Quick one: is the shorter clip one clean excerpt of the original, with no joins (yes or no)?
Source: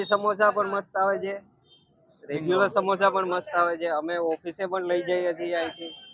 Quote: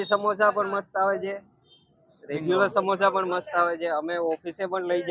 yes